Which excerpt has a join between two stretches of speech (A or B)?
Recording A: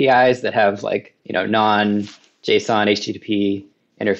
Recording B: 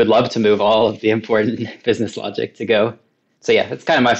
A